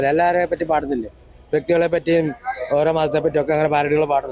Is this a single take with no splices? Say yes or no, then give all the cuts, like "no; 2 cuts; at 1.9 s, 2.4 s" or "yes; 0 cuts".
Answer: yes; 0 cuts